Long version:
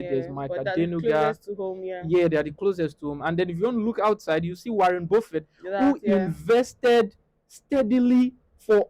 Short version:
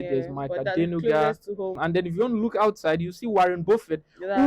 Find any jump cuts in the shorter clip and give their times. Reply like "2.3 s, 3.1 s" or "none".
1.8 s